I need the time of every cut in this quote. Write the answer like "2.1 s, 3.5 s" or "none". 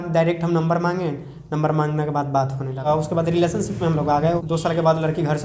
2.9 s, 4.4 s